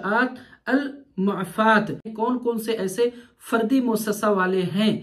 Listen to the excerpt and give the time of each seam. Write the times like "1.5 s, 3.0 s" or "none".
2.1 s